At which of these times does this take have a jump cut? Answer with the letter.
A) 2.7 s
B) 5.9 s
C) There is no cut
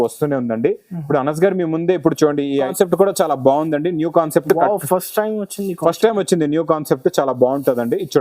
A